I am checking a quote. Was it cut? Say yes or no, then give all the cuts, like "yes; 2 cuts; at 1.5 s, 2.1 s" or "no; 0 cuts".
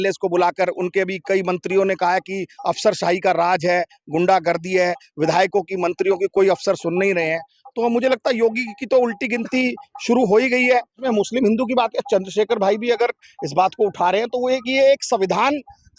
yes; 1 cut; at 11.0 s